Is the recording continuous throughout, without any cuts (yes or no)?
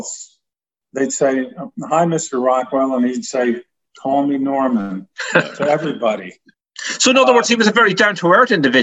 yes